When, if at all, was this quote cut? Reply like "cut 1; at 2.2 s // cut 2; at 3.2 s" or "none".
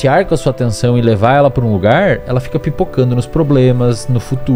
none